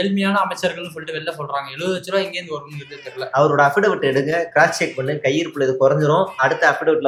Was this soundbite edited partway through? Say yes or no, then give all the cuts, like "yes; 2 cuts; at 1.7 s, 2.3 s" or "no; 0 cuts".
no; 0 cuts